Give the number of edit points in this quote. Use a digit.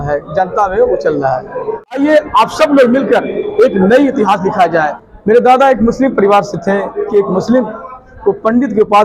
3